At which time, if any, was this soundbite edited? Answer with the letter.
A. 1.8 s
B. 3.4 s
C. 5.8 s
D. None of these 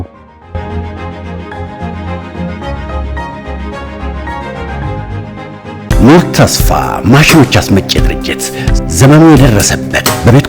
C